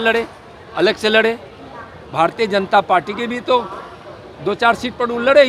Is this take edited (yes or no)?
no